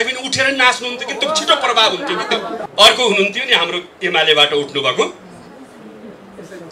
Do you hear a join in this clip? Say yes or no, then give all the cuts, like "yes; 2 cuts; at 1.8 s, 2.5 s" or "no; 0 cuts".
yes; 1 cut; at 2.6 s